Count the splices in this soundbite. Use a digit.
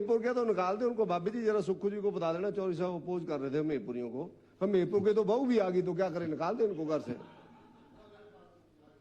0